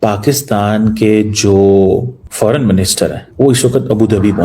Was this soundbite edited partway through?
yes; 2 cuts; at 2.2 s, 3.2 s

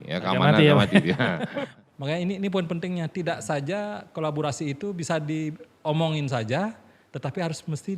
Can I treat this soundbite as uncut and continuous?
no; 1 cut; at 1.7 s

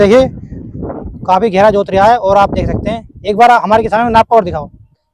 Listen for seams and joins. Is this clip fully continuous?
yes; 0 cuts

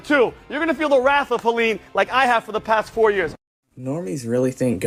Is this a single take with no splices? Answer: yes; 0 cuts

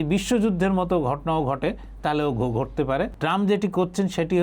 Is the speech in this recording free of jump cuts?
no; 1 cut; at 3.1 s

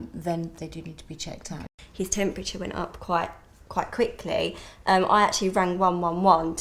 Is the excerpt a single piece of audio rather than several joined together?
no; 1 cut; at 1.7 s

